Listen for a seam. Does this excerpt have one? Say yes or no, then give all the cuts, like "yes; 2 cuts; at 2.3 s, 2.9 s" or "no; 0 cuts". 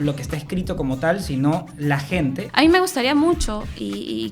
yes; 1 cut; at 2.4 s